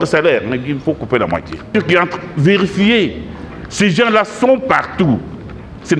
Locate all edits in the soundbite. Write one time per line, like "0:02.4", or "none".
0:01.7